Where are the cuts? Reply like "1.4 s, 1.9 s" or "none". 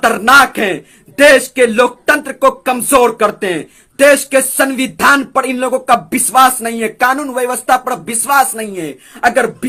none